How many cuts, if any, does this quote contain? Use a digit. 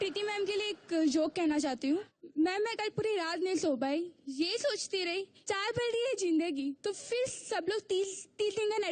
2